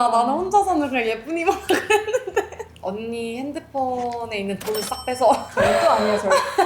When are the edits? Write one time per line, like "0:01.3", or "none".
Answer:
0:02.6
0:05.5